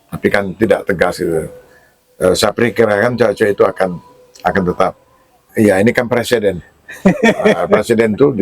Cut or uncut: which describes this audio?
cut